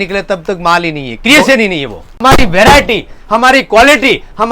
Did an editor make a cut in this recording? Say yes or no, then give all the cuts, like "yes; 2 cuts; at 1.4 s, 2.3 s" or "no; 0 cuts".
yes; 1 cut; at 2.2 s